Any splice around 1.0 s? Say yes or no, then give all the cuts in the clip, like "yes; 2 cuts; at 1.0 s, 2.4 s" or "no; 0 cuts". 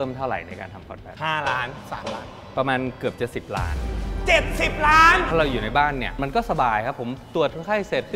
no; 1 cut; at 5.1 s